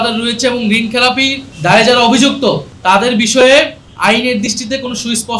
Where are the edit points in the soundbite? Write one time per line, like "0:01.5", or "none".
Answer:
0:01.4
0:02.7
0:03.8